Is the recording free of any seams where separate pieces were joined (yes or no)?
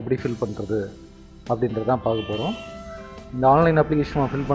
no